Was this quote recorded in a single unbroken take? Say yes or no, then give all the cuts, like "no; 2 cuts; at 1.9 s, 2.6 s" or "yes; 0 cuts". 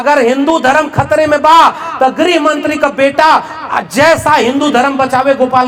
yes; 0 cuts